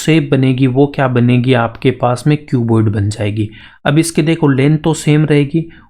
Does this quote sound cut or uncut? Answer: uncut